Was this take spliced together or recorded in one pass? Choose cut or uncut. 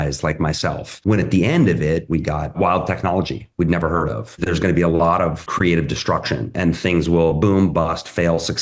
cut